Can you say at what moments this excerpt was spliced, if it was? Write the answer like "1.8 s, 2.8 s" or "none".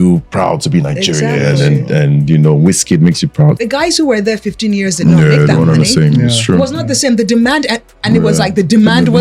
3.6 s

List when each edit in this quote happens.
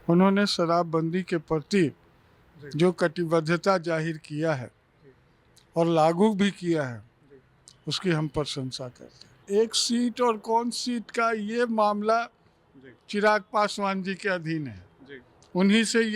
9.4 s

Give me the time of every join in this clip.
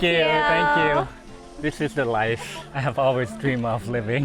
1.2 s, 2.6 s

